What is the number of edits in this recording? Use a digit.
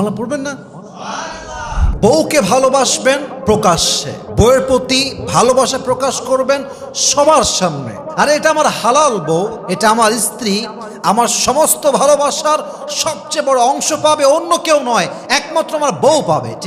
1